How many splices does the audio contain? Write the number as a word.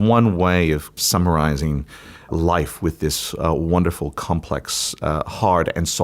one